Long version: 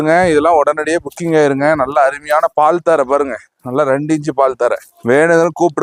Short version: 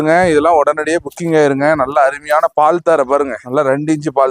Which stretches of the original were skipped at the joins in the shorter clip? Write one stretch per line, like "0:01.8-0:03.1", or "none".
0:03.4-0:03.6